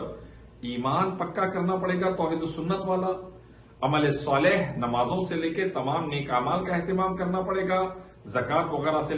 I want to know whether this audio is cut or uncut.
uncut